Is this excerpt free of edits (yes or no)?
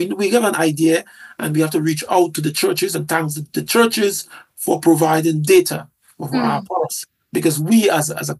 yes